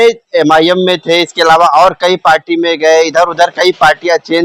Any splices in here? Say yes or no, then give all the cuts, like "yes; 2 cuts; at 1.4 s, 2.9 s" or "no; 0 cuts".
no; 0 cuts